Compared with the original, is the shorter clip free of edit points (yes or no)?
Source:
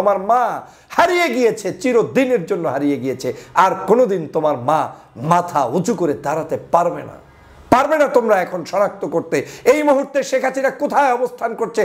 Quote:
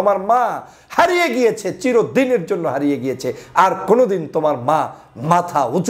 yes